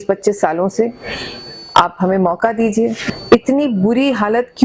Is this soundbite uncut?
no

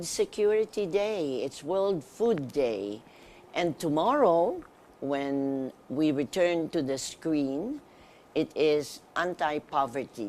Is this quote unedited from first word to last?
no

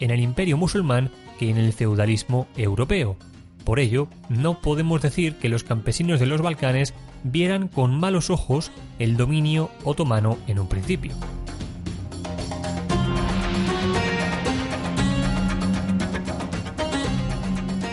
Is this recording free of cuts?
yes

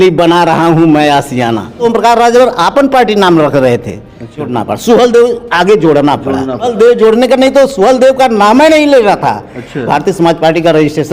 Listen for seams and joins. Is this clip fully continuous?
no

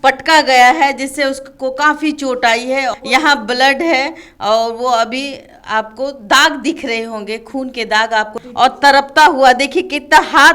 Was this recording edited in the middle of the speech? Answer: yes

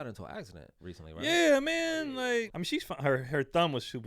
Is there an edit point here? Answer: yes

